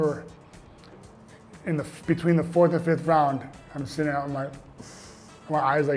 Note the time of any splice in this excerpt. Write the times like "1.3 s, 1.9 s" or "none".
none